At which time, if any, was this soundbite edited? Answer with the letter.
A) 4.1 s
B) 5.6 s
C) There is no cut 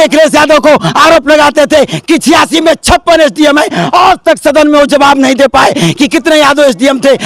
C